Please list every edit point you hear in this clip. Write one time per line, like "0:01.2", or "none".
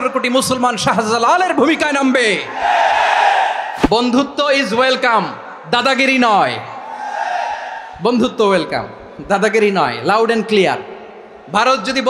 0:03.7

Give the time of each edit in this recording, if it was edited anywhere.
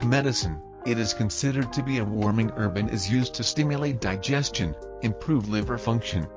0:00.9

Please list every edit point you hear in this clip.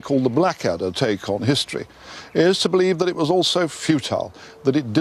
0:04.1

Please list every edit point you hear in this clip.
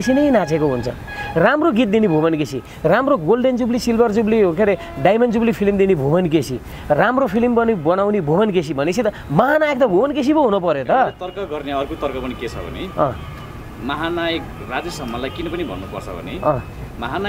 none

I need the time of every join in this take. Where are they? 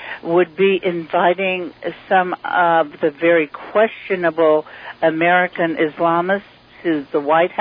none

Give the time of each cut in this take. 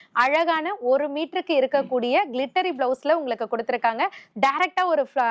0:04.2

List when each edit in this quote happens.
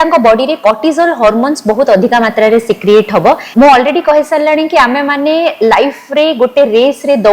0:03.4

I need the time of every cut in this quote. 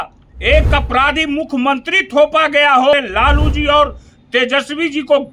0:02.9

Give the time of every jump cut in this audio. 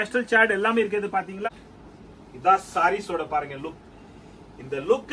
0:01.5

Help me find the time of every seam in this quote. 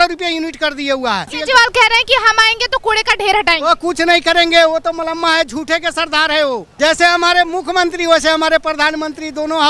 0:01.4
0:06.7

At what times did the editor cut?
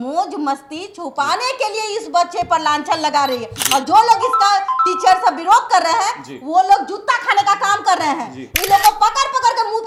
none

